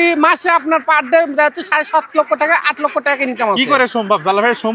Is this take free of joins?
yes; 0 cuts

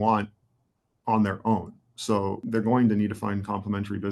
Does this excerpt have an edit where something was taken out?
yes; 1 cut; at 2.5 s

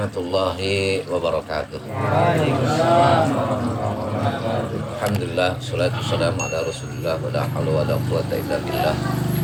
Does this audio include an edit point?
no; 0 cuts

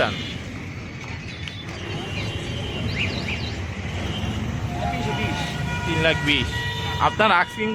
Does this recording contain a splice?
no; 0 cuts

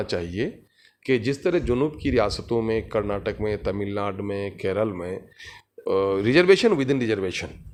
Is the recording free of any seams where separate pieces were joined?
yes; 0 cuts

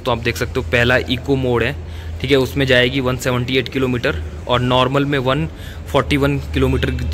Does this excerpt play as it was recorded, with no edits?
yes; 0 cuts

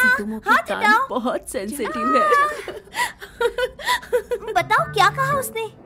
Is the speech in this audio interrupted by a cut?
yes; 1 cut; at 4.5 s

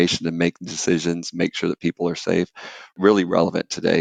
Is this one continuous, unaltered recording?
yes; 0 cuts

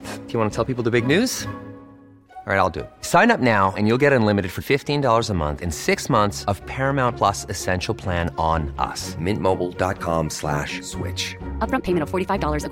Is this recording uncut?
yes; 0 cuts

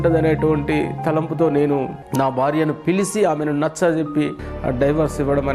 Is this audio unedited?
no; 2 cuts; at 2.0 s, 4.5 s

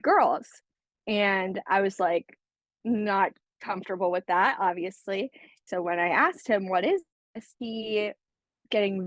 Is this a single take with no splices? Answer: no; 1 cut; at 5.6 s

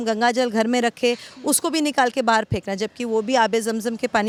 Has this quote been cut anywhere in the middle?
no; 0 cuts

